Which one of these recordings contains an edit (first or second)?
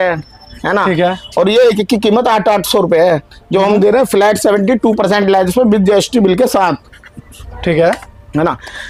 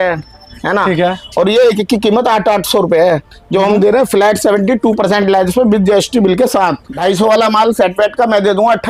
second